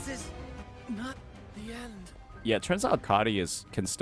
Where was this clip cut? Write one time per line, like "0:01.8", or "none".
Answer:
0:03.0